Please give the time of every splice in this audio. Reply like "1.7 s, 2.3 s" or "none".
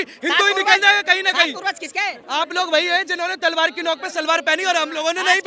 2.2 s